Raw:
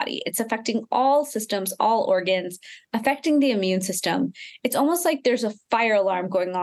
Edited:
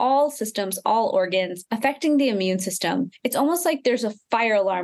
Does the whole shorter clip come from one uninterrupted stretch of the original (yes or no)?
no